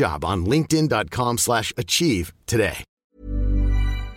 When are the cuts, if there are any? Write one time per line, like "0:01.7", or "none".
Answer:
0:02.9